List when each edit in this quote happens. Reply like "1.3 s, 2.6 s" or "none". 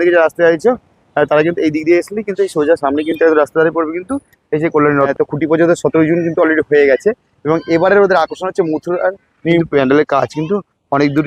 5.1 s, 9.6 s